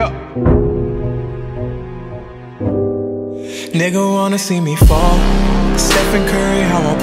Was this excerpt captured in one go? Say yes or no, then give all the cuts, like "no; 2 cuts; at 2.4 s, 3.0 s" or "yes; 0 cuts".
yes; 0 cuts